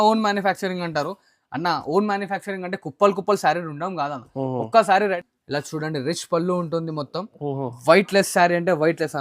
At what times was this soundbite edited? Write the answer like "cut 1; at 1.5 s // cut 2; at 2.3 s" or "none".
cut 1; at 5.2 s

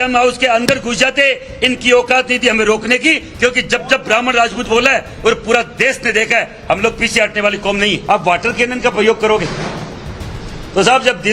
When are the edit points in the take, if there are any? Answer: cut 1; at 8.0 s

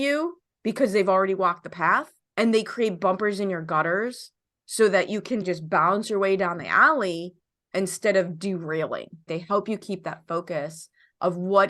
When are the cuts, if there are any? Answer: cut 1; at 2.2 s // cut 2; at 5.4 s // cut 3; at 9.3 s

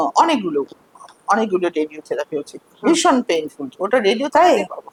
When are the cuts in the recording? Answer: none

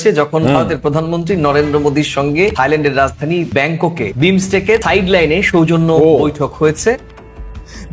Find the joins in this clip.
cut 1; at 7.0 s

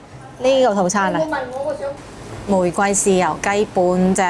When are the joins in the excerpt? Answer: cut 1; at 1.9 s

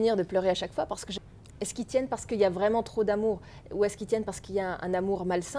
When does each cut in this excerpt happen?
cut 1; at 1.1 s

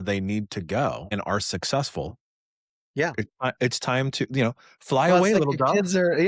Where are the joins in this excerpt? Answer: cut 1; at 1.1 s

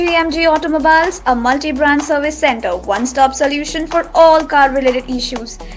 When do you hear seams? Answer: none

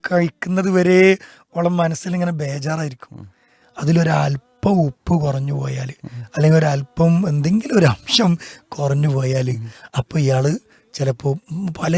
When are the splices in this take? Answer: none

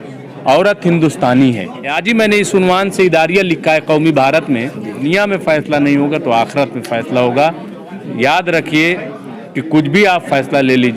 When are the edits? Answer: cut 1; at 2.0 s // cut 2; at 5.0 s

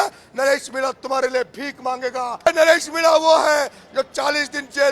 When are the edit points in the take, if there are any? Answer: cut 1; at 2.5 s

